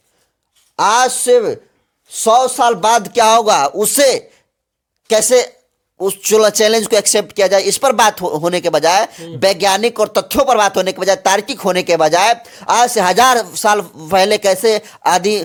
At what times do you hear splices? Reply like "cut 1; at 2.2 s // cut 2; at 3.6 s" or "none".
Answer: none